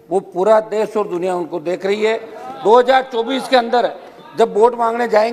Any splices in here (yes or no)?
no